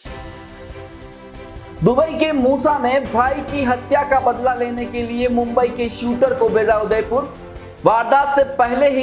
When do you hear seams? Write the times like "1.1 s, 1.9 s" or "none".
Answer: 1.7 s